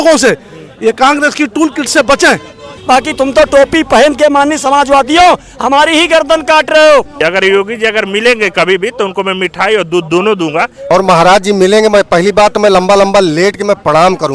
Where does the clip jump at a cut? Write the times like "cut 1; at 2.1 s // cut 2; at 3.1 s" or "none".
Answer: cut 1; at 2.7 s // cut 2; at 7.1 s // cut 3; at 10.9 s